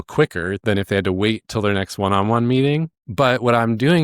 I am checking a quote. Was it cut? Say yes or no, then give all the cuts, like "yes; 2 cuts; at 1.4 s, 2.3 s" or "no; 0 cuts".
no; 0 cuts